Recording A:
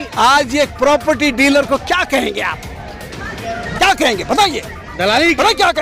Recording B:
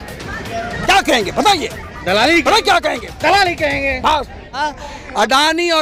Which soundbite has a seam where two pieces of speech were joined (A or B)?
B